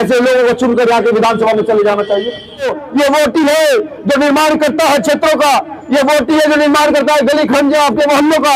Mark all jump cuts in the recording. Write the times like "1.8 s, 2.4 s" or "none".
2.8 s